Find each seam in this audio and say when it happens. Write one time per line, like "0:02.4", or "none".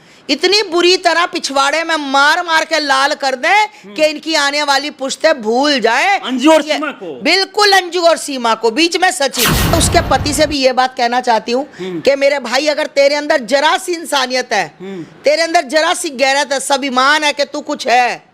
0:09.7